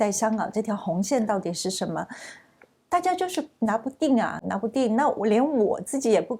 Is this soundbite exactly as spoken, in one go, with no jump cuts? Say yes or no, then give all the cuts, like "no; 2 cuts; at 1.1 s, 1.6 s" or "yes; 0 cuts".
yes; 0 cuts